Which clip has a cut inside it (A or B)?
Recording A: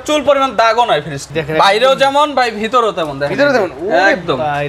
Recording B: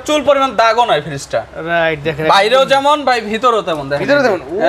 A